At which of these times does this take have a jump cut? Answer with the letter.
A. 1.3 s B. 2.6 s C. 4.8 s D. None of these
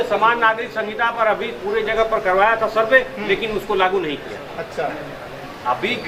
D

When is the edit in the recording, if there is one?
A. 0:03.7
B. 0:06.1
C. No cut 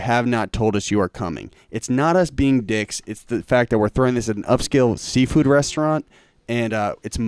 C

